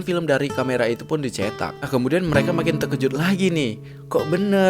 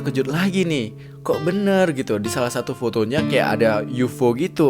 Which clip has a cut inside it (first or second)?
first